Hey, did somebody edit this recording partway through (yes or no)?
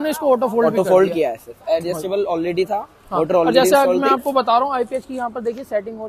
no